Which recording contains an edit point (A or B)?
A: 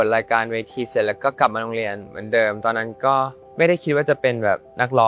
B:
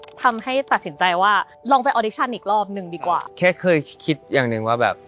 B